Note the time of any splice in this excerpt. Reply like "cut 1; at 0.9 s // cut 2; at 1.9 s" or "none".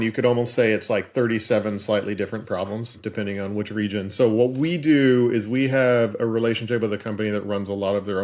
none